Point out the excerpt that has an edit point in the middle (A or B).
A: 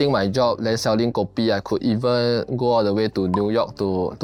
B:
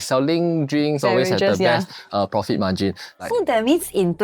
B